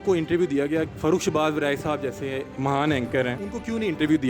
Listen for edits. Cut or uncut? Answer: cut